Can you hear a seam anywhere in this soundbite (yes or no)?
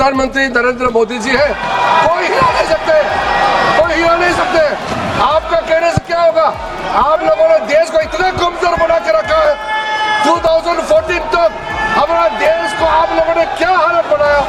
no